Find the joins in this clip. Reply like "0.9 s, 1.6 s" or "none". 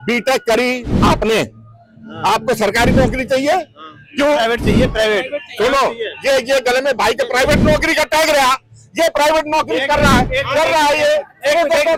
none